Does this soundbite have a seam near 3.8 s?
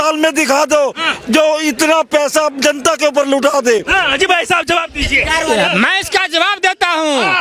no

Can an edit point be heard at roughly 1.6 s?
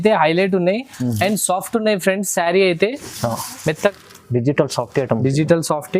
no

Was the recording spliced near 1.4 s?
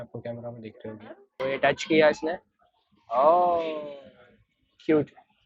yes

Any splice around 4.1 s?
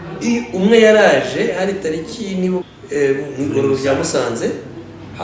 no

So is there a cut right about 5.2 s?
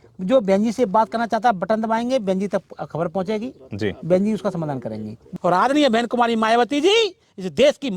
yes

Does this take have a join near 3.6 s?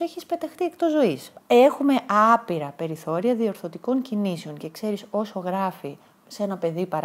no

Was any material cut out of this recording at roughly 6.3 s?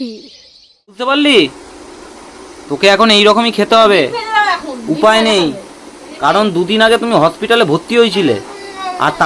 no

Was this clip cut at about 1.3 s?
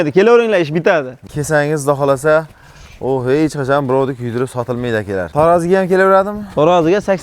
yes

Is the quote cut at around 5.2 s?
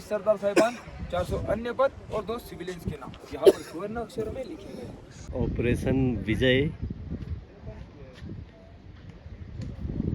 yes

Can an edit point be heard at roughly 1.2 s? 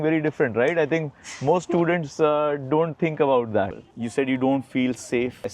no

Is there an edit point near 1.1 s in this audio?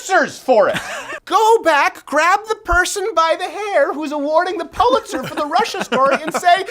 yes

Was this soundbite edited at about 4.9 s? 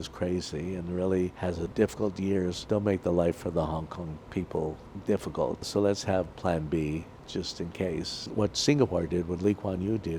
yes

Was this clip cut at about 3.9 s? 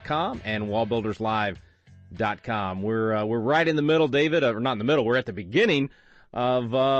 yes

